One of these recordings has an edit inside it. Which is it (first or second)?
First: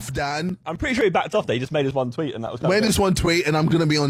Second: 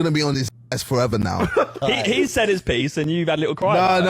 second